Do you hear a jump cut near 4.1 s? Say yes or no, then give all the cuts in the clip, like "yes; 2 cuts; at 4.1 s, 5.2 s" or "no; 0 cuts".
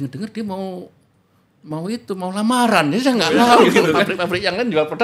yes; 1 cut; at 4.1 s